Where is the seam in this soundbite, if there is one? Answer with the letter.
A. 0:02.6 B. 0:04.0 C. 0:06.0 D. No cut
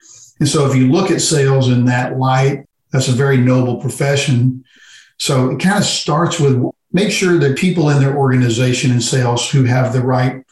A